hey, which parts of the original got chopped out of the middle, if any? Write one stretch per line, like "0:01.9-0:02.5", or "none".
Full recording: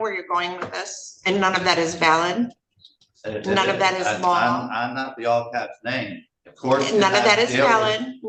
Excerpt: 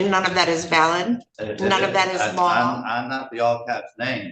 0:02.7-0:03.2